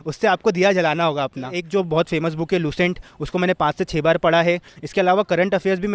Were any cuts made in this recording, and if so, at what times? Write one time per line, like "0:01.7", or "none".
0:01.6